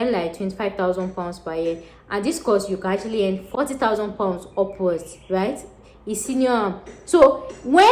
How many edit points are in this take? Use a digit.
1